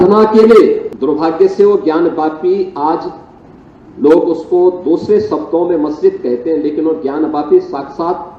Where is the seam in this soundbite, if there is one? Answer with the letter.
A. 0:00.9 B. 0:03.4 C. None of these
A